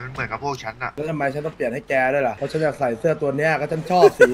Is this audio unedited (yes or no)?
no